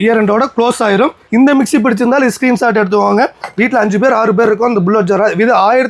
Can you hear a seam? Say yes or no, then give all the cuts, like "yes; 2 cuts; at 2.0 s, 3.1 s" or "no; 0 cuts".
yes; 1 cut; at 1.2 s